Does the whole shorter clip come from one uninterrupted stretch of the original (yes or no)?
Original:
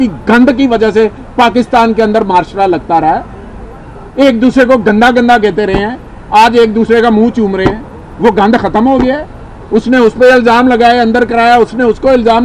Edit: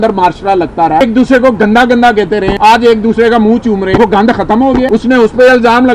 no